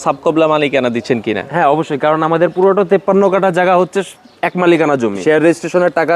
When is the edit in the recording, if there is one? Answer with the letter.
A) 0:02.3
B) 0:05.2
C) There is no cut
B